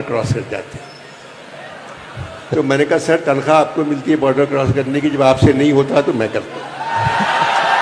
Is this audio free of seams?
yes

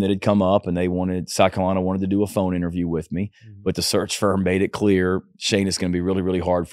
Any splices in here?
no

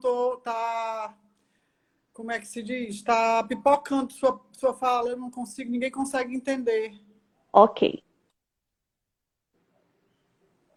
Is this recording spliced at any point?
no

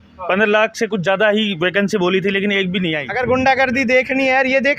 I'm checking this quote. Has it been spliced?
yes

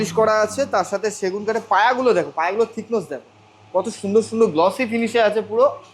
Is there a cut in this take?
no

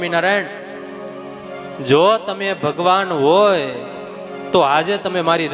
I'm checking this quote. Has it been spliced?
no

